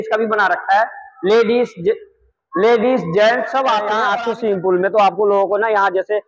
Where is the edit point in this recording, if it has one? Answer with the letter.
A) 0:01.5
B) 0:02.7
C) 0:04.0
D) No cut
C